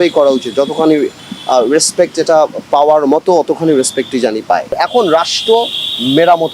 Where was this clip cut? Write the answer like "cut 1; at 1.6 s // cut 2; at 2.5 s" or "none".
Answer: cut 1; at 4.7 s